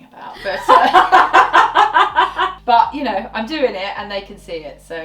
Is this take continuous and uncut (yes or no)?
no